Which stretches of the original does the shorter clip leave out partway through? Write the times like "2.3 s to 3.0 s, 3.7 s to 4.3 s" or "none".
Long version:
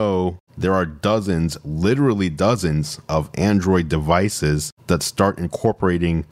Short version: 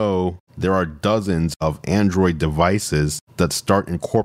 1.5 s to 3.0 s